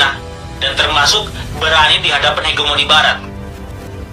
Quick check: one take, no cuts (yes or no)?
no